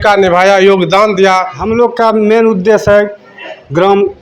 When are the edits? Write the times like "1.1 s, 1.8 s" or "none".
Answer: 1.6 s